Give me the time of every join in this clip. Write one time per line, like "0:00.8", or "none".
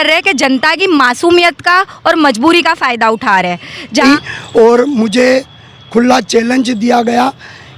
0:04.0